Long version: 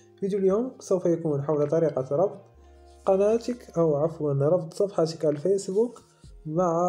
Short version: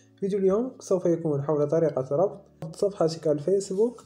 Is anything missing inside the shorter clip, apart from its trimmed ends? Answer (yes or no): yes